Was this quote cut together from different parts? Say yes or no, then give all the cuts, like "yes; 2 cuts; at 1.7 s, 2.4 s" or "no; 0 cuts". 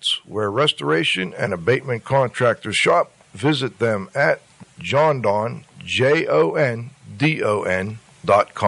yes; 1 cut; at 4.6 s